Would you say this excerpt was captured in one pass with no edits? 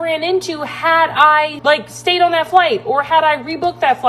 no; 1 cut; at 1.6 s

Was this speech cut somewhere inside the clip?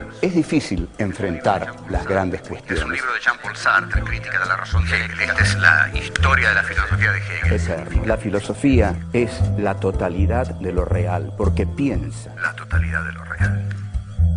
yes; 1 cut; at 5.6 s

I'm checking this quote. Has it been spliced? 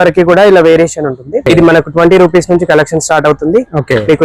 yes; 1 cut; at 1.4 s

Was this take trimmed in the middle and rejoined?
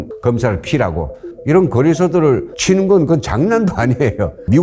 yes; 2 cuts; at 1.3 s, 2.5 s

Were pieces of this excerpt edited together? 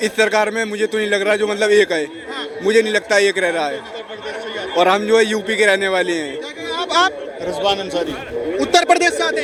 no; 0 cuts

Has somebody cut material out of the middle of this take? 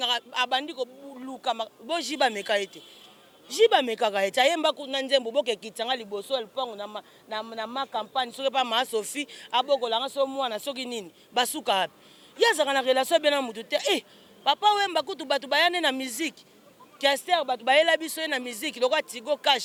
no; 0 cuts

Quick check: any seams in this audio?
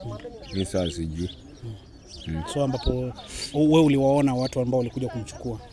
no; 0 cuts

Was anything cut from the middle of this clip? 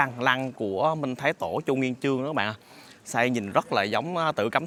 no; 0 cuts

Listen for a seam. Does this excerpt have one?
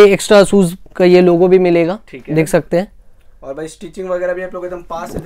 no; 0 cuts

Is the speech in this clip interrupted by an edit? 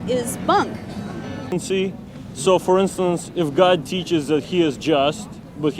yes; 1 cut; at 1.4 s

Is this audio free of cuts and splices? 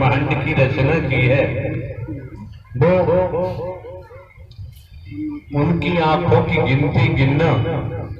yes; 0 cuts

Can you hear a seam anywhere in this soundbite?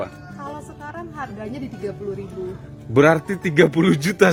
no; 0 cuts

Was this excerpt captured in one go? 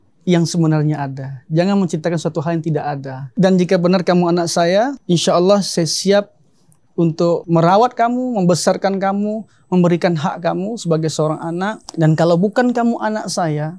no; 4 cuts; at 3.2 s, 5.0 s, 7.4 s, 11.8 s

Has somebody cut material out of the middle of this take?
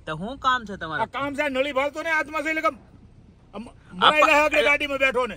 no; 0 cuts

